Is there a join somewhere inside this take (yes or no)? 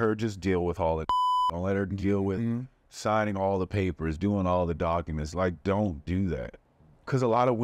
yes